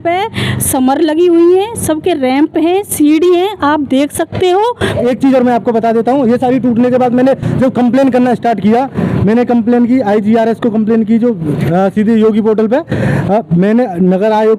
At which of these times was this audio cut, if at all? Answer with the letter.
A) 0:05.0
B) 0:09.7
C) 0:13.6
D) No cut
A